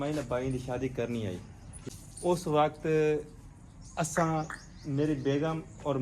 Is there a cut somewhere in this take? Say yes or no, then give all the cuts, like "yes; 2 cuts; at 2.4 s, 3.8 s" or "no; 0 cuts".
yes; 1 cut; at 1.7 s